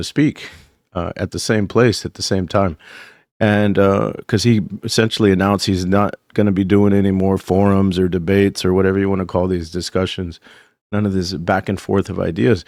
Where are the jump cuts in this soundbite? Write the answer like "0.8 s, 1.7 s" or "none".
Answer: none